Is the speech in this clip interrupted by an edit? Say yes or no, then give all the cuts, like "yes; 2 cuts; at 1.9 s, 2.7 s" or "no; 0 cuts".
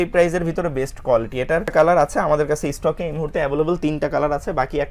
no; 0 cuts